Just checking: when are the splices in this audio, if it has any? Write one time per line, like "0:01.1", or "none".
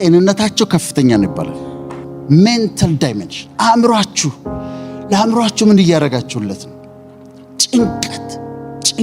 0:02.0